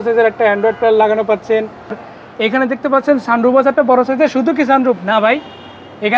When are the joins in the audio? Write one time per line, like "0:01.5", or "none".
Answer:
0:02.0

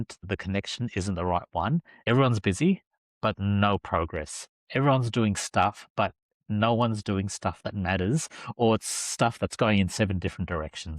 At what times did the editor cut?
0:01.9

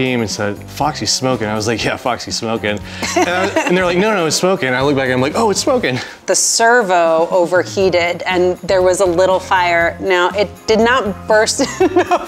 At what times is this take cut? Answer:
none

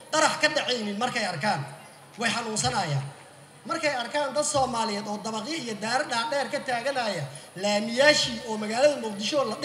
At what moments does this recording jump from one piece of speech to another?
none

